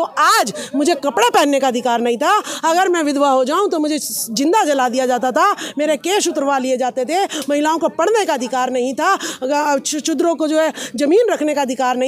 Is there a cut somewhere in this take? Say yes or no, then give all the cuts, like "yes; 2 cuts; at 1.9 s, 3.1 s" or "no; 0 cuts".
no; 0 cuts